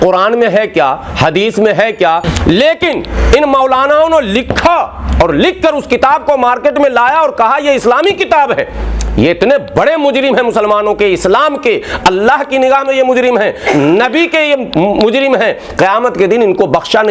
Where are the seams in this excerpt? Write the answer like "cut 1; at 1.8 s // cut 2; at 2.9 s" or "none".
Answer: cut 1; at 2.3 s